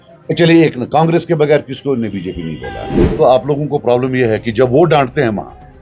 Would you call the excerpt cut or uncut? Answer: cut